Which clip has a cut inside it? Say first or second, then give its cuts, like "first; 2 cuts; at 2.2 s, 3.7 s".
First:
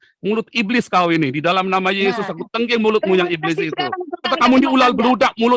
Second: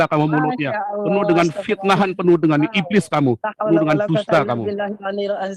first; 1 cut; at 4.3 s